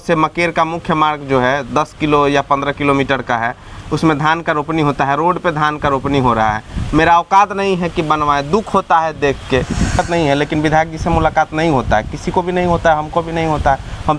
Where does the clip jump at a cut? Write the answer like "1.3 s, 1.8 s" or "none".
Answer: 10.0 s